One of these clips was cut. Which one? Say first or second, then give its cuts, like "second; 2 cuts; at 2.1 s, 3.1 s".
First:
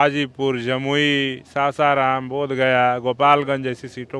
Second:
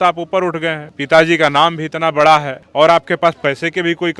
second; 2 cuts; at 0.9 s, 2.6 s